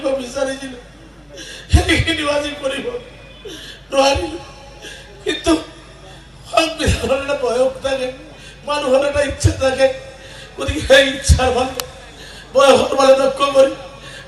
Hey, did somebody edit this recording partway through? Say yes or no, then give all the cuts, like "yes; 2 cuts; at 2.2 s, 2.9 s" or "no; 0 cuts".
no; 0 cuts